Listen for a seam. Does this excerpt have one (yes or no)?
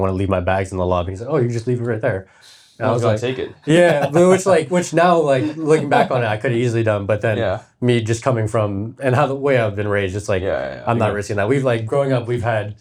no